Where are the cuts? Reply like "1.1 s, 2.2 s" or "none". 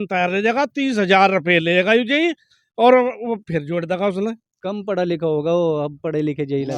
4.6 s